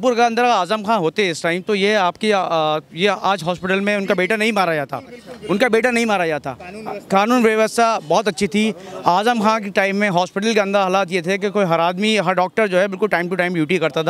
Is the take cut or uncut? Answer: uncut